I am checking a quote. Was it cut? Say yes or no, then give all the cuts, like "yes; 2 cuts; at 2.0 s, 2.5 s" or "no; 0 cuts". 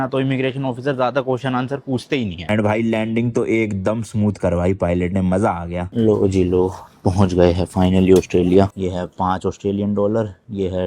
yes; 2 cuts; at 2.4 s, 8.7 s